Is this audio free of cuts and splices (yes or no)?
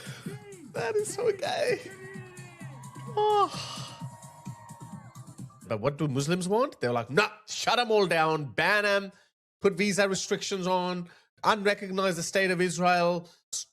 no